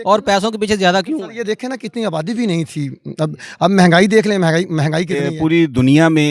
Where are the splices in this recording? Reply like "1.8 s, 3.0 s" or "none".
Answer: 5.2 s